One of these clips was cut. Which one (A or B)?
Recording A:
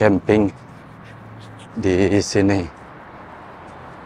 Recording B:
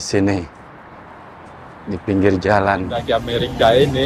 B